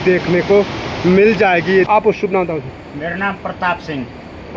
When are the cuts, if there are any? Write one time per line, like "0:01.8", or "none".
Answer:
0:01.9